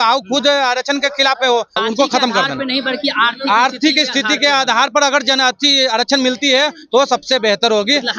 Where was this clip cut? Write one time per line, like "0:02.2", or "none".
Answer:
0:01.8